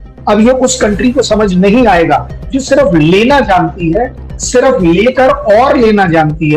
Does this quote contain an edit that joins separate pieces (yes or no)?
no